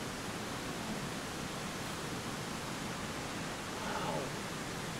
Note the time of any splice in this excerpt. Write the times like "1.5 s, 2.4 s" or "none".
none